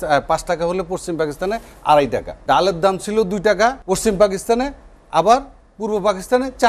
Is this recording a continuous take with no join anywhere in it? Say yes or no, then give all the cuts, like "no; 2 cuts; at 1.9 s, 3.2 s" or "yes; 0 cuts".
no; 2 cuts; at 2.3 s, 3.8 s